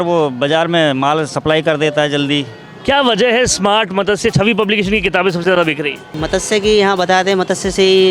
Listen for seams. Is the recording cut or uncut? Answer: cut